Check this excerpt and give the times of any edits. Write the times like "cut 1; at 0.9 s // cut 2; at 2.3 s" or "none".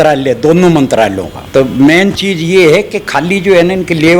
cut 1; at 1.3 s